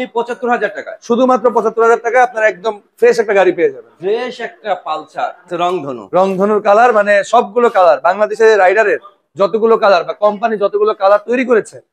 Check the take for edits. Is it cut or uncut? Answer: cut